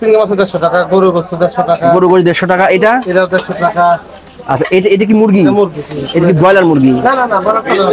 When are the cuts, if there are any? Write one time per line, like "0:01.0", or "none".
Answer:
none